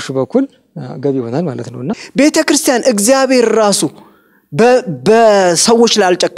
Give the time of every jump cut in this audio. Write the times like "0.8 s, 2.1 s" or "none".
2.0 s